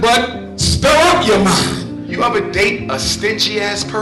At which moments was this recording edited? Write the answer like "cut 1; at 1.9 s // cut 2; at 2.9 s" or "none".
cut 1; at 1.8 s